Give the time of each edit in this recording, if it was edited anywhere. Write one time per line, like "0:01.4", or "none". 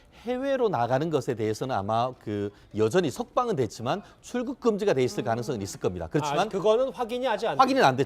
0:05.8